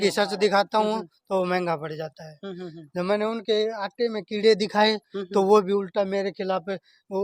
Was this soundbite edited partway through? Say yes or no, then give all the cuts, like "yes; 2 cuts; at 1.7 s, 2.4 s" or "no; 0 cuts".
no; 0 cuts